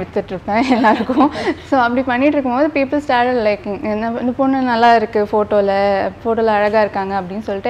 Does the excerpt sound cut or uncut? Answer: uncut